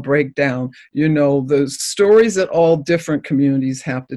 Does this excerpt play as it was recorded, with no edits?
yes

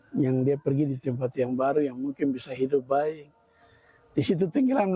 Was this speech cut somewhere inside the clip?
no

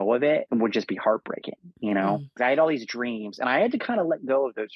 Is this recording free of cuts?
no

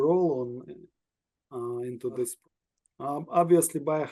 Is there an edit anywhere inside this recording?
yes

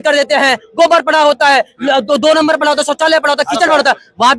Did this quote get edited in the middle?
no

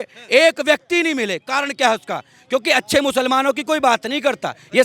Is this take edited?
no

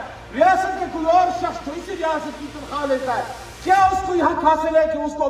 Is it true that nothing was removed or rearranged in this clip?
yes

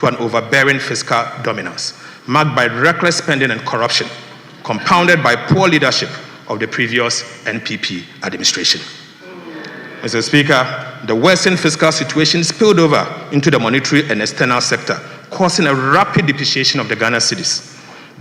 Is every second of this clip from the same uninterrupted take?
yes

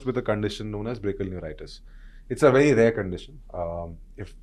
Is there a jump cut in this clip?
no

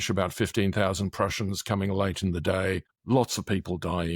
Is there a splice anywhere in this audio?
yes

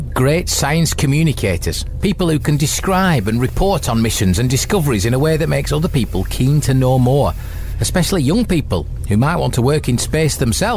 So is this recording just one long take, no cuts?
yes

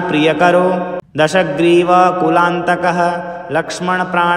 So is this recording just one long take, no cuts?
no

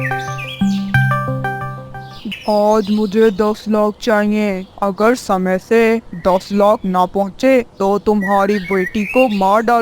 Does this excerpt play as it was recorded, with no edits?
no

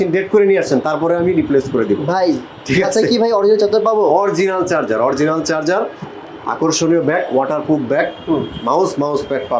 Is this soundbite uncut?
yes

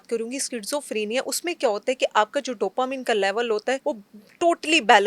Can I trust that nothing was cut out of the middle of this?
no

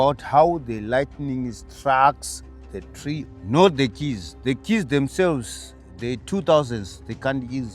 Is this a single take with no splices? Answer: no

